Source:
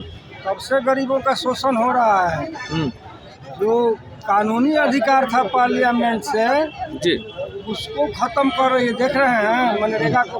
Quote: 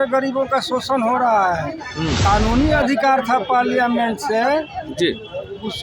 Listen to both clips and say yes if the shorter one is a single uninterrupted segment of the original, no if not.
no